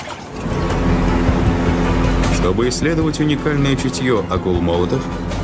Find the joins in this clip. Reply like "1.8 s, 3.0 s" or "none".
3.4 s